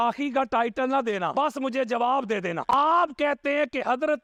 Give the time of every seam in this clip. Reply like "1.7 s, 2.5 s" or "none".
none